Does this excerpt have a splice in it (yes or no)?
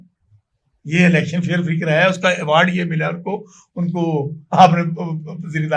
no